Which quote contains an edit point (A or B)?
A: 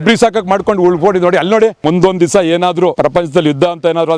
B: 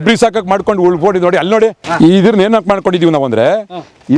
A